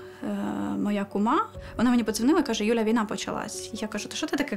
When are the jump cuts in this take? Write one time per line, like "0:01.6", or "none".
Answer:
0:01.6